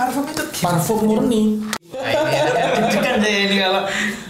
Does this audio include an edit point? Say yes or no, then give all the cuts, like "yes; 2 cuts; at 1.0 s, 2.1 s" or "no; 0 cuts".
yes; 1 cut; at 1.9 s